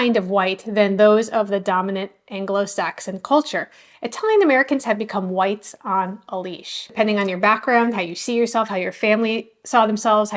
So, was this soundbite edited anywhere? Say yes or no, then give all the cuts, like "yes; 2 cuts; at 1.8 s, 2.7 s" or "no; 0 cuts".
no; 0 cuts